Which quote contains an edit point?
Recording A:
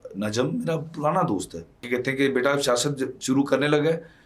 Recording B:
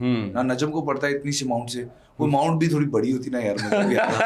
A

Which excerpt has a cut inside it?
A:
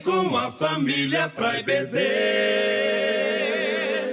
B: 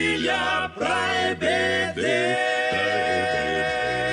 B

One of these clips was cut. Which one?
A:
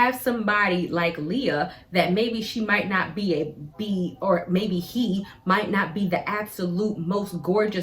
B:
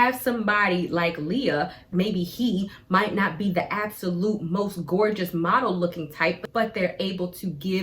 B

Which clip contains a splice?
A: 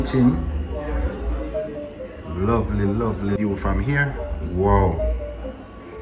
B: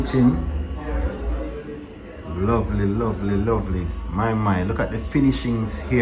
A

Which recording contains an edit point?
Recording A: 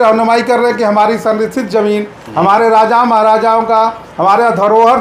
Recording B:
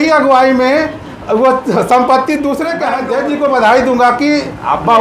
B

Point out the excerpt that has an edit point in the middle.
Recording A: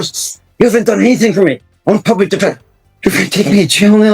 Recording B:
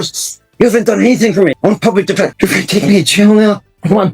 B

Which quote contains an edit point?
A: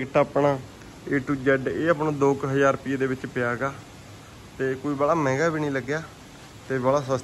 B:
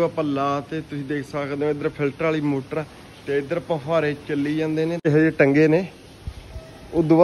B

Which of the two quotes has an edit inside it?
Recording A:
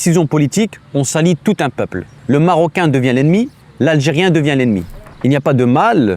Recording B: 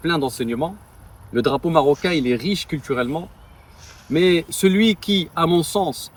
A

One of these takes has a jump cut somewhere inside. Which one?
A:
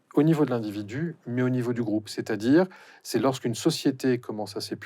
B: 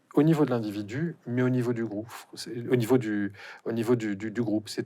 A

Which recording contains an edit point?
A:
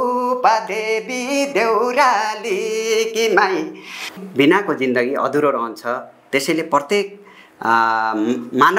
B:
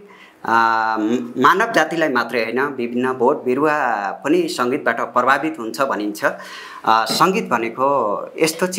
A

